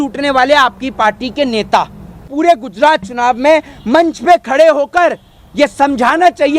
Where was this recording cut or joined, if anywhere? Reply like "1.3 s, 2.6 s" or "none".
2.3 s